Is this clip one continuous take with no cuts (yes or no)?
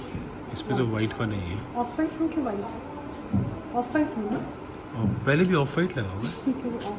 yes